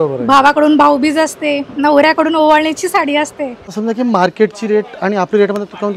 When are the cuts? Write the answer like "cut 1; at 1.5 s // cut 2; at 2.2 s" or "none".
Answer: cut 1; at 3.7 s